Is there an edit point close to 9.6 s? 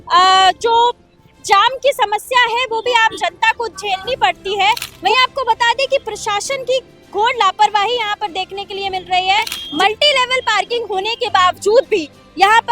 yes; 2 cuts; at 4.9 s, 9.6 s

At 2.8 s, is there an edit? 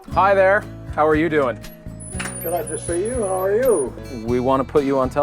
no; 1 cut; at 4.1 s

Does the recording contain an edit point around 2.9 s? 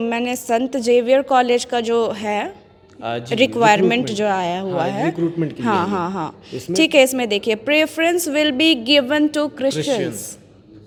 no; 0 cuts

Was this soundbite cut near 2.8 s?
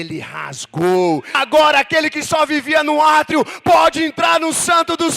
no; 1 cut; at 1.4 s

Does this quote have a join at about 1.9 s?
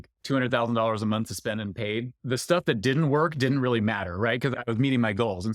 no; 1 cut; at 4.5 s

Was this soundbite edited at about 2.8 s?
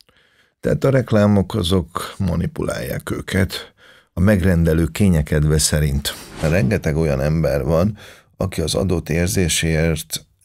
no; 1 cut; at 6.4 s

